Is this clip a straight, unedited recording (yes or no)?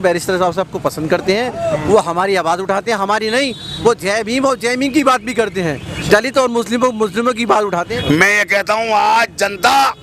no